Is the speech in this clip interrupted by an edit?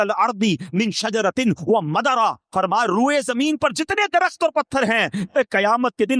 no; 0 cuts

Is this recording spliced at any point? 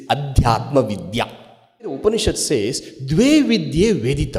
yes; 1 cut; at 2.0 s

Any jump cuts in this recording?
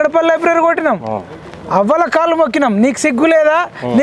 no; 0 cuts

